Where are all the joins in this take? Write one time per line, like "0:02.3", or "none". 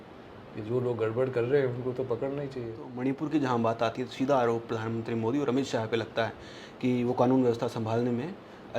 0:02.8